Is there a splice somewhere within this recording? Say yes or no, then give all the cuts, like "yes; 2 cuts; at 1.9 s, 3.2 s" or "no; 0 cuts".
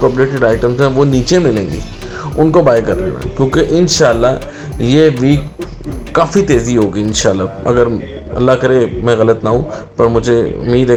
no; 0 cuts